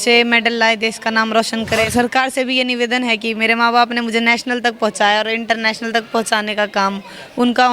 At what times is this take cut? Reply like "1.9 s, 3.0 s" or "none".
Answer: 1.9 s